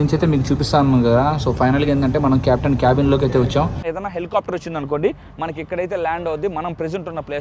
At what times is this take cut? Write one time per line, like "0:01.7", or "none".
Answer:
0:03.8